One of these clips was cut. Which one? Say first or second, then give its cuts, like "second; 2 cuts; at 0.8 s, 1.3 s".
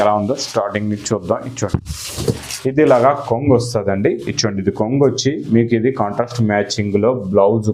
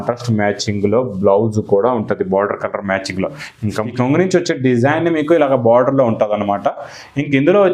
second; 1 cut; at 3.9 s